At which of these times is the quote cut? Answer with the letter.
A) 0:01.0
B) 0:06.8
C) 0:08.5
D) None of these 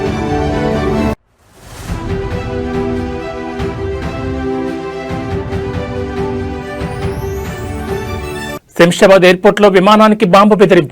C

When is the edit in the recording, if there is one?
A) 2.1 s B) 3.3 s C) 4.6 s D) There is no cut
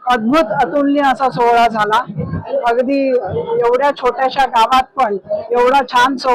D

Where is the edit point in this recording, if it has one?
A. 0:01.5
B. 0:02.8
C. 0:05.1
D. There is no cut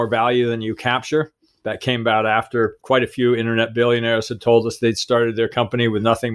B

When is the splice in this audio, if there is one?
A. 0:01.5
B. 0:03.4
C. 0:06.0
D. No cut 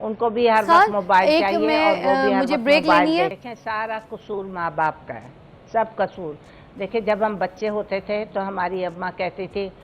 B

